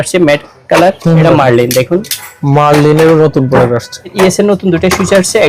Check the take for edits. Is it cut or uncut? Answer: cut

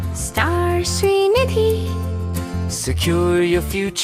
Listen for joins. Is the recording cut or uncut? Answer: uncut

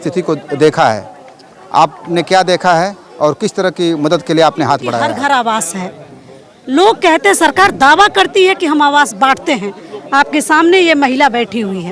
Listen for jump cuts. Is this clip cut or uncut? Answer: cut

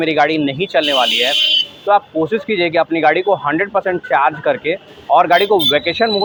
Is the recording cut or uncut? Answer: uncut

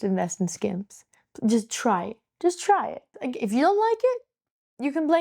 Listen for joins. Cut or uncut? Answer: cut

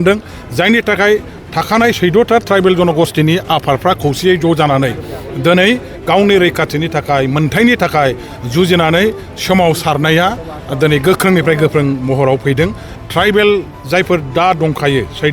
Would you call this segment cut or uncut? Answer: cut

